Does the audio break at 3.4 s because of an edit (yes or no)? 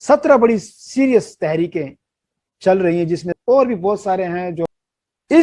yes